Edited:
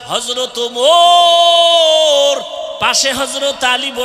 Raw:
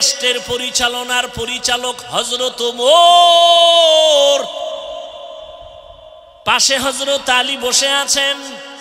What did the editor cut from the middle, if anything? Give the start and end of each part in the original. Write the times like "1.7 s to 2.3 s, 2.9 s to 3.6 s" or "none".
4.8 s to 6.4 s